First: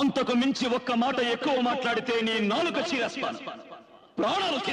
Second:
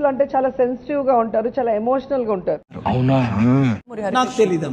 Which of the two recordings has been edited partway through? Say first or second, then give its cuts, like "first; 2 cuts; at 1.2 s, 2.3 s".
second; 2 cuts; at 2.8 s, 3.8 s